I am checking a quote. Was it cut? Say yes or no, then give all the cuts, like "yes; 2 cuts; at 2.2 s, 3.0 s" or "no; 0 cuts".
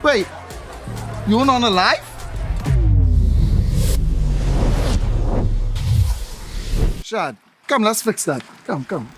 no; 0 cuts